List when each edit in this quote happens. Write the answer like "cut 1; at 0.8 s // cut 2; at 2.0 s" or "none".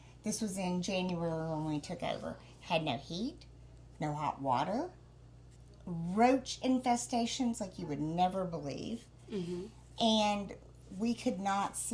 none